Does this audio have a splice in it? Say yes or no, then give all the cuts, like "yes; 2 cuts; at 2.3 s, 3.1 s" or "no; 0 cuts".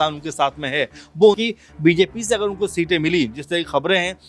yes; 1 cut; at 1.4 s